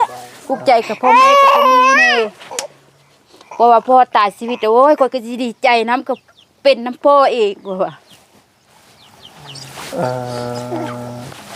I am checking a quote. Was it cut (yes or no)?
no